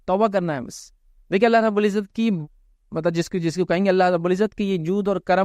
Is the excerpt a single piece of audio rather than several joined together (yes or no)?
yes